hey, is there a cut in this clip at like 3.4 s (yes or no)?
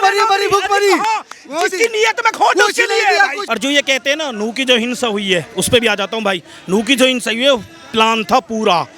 yes